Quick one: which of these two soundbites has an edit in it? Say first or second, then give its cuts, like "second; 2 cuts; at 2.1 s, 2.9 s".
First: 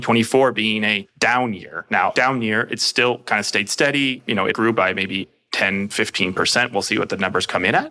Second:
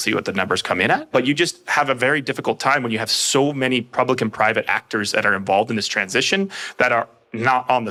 first; 4 cuts; at 1.1 s, 2.1 s, 4.5 s, 5.4 s